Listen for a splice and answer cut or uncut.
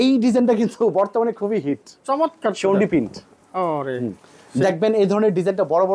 uncut